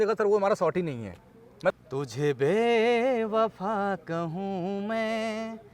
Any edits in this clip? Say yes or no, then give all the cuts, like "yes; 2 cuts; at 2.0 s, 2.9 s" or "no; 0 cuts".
yes; 1 cut; at 1.7 s